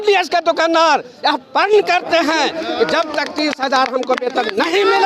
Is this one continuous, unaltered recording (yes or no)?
yes